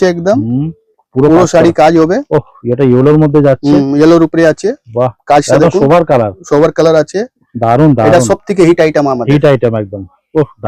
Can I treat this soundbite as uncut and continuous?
yes; 0 cuts

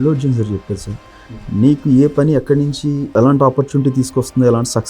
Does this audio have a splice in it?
yes; 1 cut; at 3.1 s

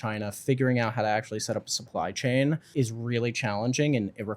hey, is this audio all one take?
no; 1 cut; at 2.7 s

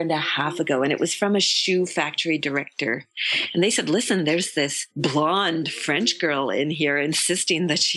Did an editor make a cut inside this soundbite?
yes; 1 cut; at 3.1 s

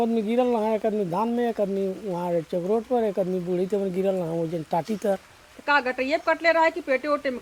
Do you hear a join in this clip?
no; 0 cuts

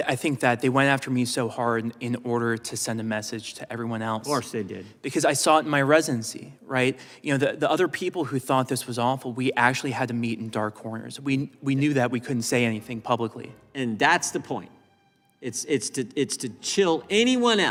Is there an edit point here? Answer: no; 0 cuts

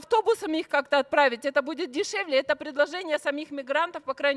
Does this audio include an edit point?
no; 0 cuts

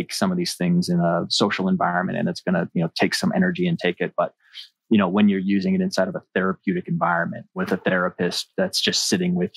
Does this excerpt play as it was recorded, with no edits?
no; 1 cut; at 7.6 s

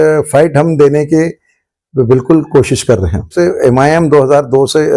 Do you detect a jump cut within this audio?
yes; 1 cut; at 3.3 s

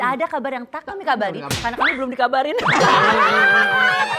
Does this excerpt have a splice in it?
no; 0 cuts

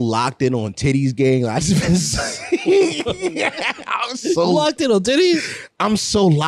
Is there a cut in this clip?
no; 0 cuts

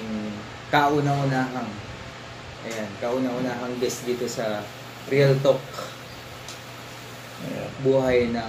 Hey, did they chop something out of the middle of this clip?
no; 0 cuts

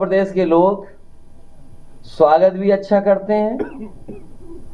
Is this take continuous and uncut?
yes; 0 cuts

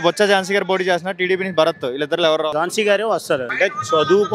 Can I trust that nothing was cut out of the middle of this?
no; 2 cuts; at 2.5 s, 3.5 s

